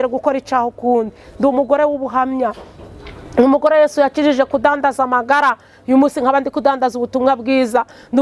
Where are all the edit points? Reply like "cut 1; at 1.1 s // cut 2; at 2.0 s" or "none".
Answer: none

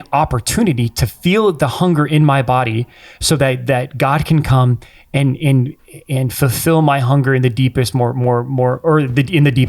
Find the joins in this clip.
none

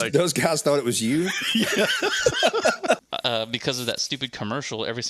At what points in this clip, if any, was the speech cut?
cut 1; at 3.0 s

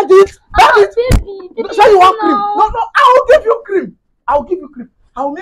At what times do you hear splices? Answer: none

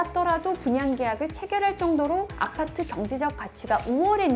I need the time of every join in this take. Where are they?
none

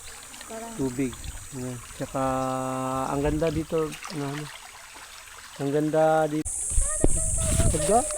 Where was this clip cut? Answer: cut 1; at 6.5 s

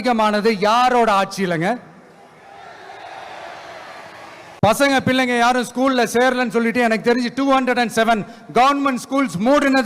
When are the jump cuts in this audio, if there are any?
cut 1; at 4.5 s

